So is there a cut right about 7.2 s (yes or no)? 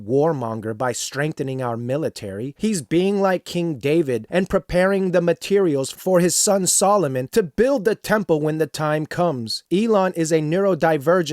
no